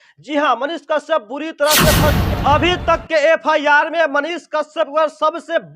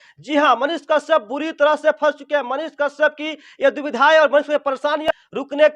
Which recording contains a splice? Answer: first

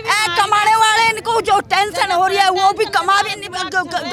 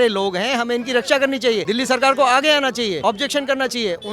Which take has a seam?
second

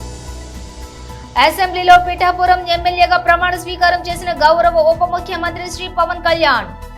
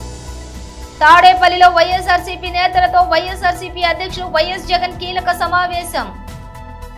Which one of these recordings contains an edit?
first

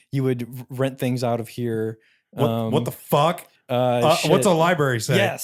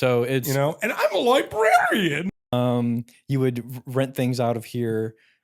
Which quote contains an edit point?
second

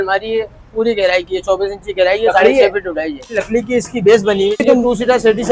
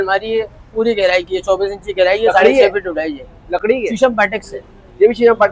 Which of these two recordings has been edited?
first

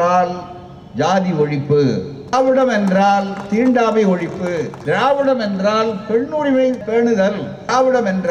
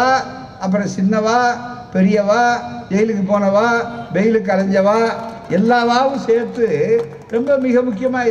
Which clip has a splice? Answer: first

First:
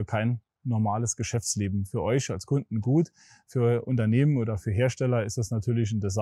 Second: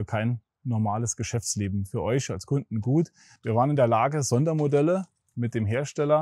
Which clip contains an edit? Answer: second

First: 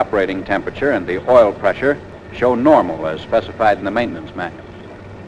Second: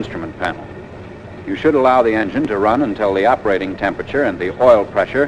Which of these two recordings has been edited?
second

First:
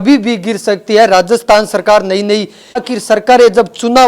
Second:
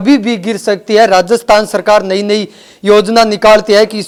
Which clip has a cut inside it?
first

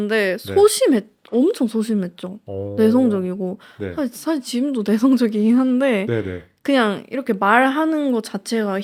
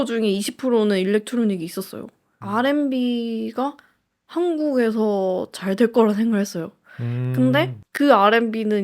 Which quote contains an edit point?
second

